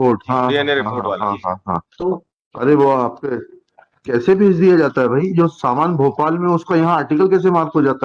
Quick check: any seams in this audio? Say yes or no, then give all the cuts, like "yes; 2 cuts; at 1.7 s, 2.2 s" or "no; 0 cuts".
no; 0 cuts